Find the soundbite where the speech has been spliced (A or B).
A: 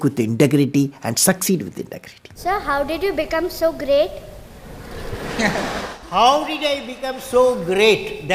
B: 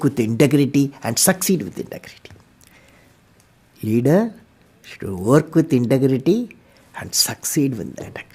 A